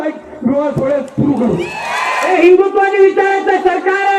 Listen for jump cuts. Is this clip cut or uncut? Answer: cut